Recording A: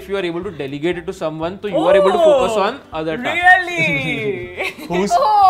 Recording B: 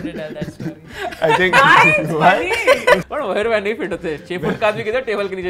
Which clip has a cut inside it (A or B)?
B